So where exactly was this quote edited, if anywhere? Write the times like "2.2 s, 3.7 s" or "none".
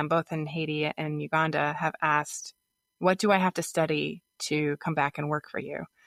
none